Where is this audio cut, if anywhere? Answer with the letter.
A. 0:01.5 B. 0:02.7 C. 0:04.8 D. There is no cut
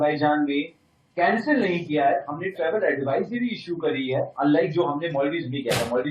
D